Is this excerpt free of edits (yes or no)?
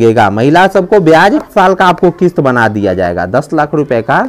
no